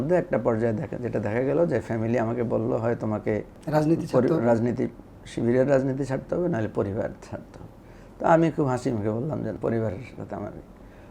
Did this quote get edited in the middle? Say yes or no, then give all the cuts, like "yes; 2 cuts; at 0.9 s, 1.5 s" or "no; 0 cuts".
yes; 2 cuts; at 3.5 s, 9.6 s